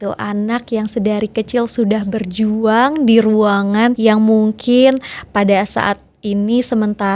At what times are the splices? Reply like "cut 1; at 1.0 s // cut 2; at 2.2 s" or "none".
cut 1; at 4.0 s